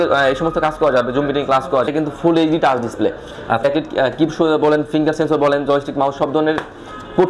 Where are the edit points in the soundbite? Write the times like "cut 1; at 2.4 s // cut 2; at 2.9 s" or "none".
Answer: cut 1; at 1.9 s // cut 2; at 3.6 s